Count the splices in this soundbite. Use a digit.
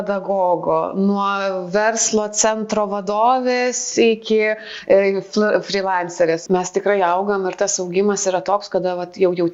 1